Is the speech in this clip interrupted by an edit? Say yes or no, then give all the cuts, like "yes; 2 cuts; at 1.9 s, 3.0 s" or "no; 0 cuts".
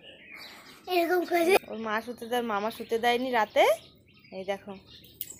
yes; 1 cut; at 1.6 s